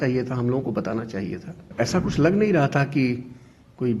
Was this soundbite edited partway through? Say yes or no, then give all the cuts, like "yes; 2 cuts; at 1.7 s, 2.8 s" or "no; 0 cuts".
yes; 1 cut; at 1.7 s